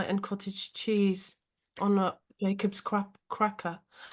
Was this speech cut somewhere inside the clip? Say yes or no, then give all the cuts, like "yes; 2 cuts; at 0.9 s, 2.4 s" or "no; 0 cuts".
no; 0 cuts